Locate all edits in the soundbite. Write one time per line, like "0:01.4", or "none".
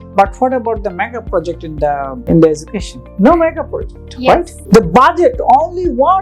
0:02.2
0:04.5